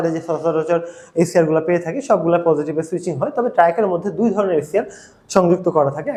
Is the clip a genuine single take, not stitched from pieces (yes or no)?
yes